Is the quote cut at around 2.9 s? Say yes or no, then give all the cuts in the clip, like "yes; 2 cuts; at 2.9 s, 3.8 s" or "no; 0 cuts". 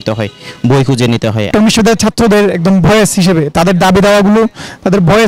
no; 1 cut; at 1.5 s